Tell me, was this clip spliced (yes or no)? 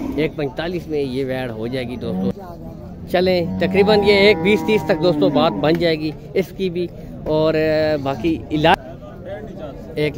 yes